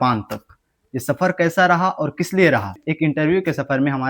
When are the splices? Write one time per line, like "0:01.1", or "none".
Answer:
0:02.8